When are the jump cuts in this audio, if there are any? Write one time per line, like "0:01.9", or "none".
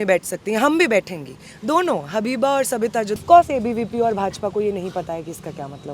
0:03.2